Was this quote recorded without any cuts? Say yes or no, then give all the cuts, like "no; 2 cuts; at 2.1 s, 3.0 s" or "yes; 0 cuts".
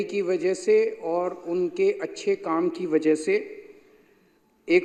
yes; 0 cuts